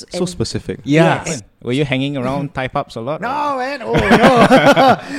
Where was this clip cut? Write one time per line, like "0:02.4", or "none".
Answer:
0:01.4